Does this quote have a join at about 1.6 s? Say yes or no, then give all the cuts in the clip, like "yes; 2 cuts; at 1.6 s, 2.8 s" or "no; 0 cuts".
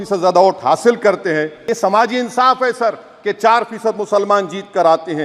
yes; 1 cut; at 1.6 s